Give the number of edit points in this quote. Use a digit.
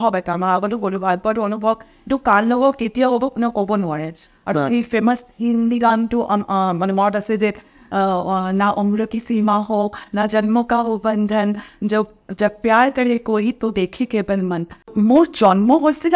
1